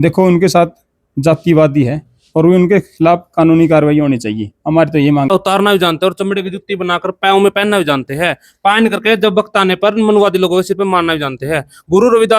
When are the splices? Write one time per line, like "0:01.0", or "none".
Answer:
0:05.3